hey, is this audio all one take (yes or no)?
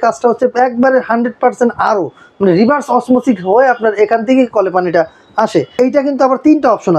no